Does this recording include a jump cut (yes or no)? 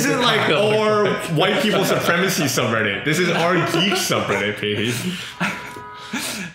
no